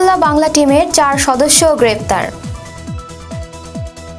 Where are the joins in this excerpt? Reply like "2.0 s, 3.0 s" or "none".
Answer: 2.3 s